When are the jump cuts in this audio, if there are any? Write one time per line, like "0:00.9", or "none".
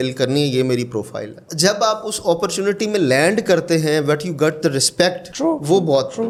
none